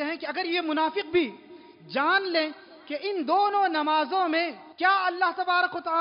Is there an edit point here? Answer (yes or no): yes